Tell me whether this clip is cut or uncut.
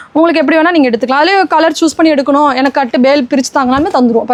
uncut